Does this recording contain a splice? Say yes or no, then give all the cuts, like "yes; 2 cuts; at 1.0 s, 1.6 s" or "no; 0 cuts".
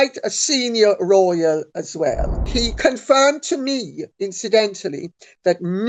yes; 1 cut; at 2.5 s